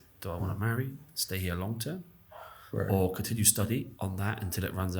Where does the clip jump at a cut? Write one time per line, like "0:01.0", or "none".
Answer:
0:03.9